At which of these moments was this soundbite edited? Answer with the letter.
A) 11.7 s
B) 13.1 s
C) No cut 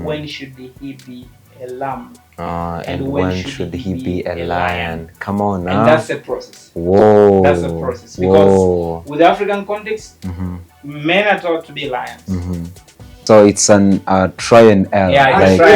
B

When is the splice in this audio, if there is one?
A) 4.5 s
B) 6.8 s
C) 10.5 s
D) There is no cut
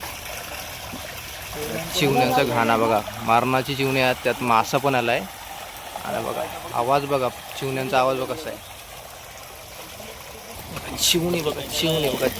C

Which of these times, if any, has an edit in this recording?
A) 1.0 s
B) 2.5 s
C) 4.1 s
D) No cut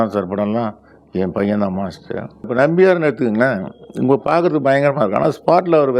B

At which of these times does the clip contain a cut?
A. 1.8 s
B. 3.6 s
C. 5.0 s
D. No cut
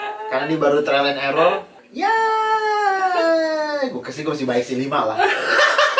A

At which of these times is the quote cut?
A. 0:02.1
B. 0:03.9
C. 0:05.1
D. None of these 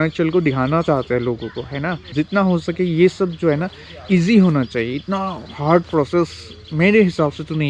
A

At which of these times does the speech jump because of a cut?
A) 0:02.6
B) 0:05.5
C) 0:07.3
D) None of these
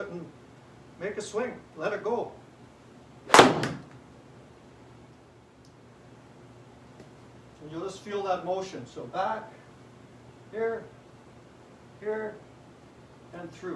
B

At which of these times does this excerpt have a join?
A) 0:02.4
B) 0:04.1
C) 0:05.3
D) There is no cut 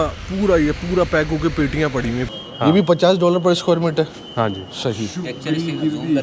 A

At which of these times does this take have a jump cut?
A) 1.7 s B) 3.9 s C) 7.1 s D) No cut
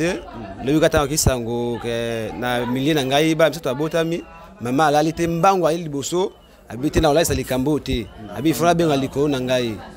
D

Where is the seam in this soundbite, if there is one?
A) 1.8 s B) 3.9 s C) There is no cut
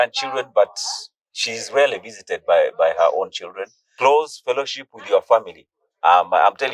B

